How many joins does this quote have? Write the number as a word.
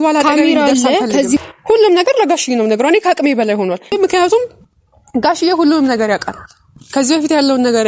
two